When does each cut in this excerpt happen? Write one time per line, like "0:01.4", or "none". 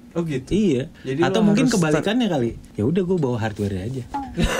0:01.0
0:02.6